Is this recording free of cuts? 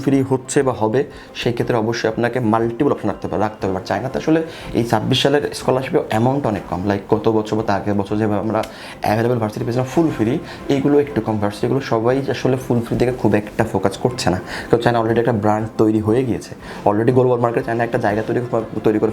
yes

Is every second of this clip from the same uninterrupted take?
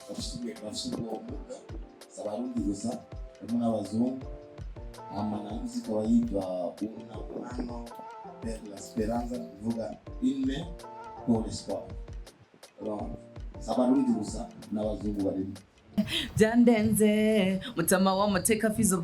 no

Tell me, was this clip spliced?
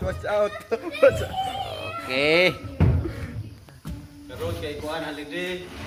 no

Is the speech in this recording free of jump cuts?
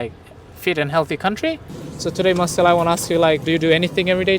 no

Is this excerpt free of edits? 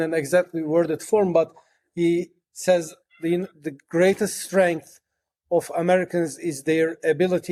yes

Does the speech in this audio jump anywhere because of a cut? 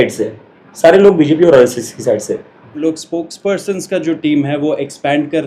yes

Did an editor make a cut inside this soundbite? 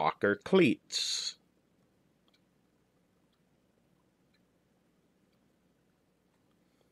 no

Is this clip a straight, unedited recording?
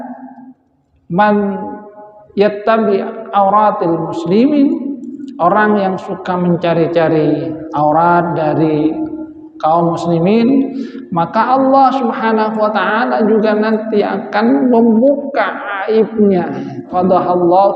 no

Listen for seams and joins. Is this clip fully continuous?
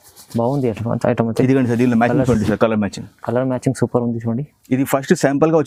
yes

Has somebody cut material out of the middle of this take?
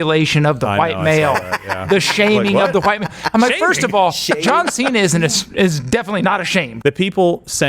yes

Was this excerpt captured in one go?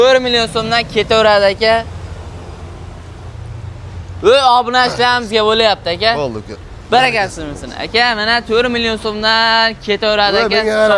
yes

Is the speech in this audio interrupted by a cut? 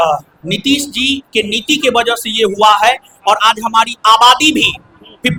no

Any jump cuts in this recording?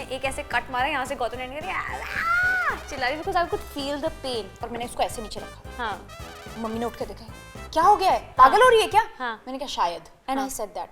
yes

